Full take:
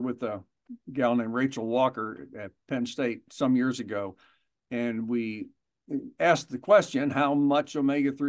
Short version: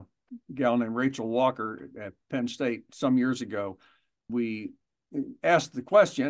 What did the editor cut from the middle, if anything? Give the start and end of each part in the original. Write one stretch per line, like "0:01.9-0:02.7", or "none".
0:04.7-0:05.0